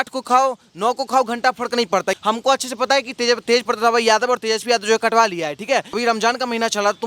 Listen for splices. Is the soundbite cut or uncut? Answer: cut